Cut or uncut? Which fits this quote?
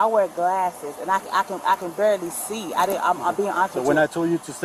uncut